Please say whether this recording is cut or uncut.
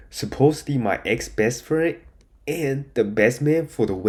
uncut